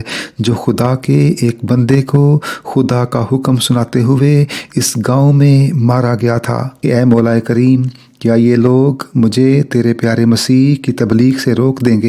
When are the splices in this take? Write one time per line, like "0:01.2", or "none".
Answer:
0:06.7

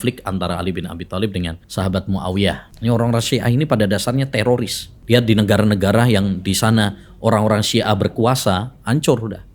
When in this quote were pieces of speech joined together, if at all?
0:01.6
0:02.7
0:04.9

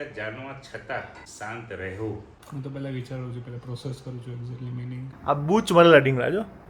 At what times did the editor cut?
0:02.3
0:05.1

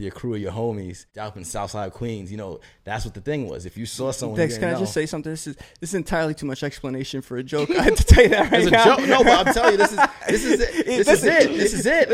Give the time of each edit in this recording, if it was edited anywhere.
0:01.0

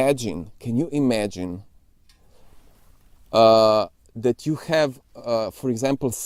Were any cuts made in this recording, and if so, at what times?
none

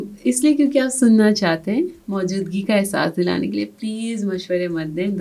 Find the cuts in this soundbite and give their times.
none

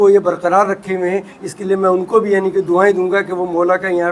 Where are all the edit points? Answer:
none

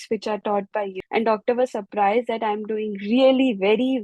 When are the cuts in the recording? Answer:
0:00.9

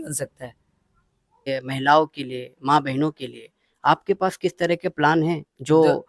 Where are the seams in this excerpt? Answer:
0:01.5

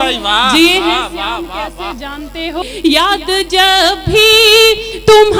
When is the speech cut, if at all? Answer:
0:02.6

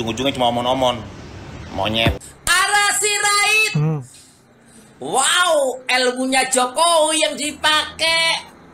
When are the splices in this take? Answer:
0:02.2

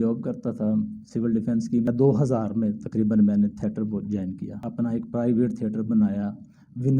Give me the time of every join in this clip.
0:01.9
0:04.6

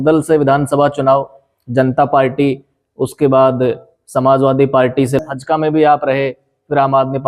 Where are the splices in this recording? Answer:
0:05.2

